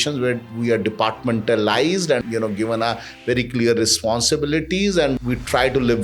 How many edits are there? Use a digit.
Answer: 2